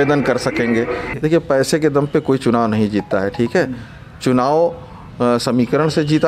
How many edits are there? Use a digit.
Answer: 1